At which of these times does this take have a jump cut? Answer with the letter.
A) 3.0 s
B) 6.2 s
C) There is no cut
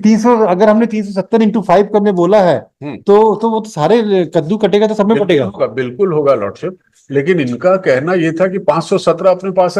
C